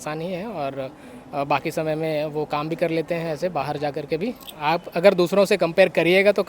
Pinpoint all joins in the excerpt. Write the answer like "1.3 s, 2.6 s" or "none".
4.5 s